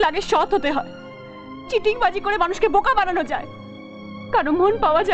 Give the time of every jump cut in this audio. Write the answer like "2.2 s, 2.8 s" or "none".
none